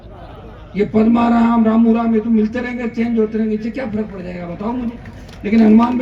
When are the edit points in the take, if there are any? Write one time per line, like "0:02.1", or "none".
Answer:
none